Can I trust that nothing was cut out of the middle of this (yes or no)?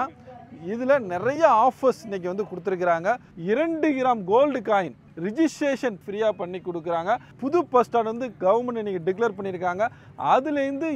no